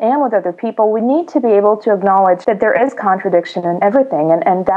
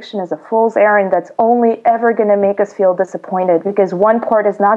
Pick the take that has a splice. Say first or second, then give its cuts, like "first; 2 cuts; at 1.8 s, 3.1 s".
first; 2 cuts; at 2.4 s, 3.8 s